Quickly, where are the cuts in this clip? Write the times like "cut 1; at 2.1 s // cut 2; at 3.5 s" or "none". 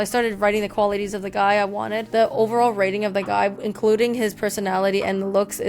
cut 1; at 2.1 s